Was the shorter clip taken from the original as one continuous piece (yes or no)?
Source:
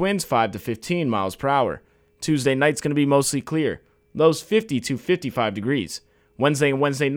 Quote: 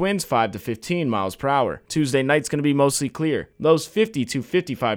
no